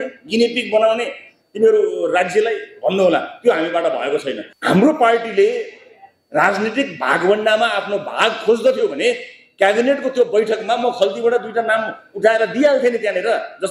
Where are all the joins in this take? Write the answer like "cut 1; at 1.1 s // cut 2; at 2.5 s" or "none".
cut 1; at 4.5 s